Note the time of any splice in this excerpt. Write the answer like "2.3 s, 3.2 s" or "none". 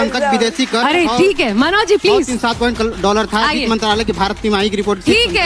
none